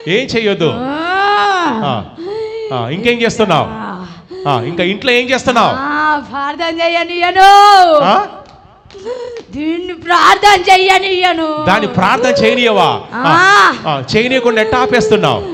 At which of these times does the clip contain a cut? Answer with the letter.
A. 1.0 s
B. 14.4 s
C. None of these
C